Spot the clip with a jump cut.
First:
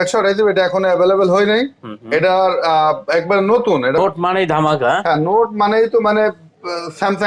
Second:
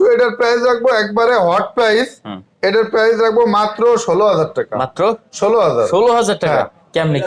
first; 1 cut; at 4.0 s

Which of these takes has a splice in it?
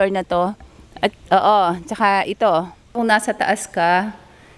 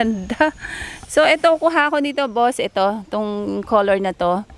first; 1 cut; at 3.0 s

